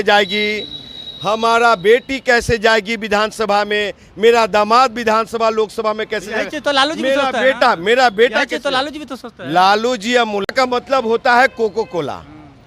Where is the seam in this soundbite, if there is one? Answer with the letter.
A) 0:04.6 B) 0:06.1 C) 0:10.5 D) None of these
C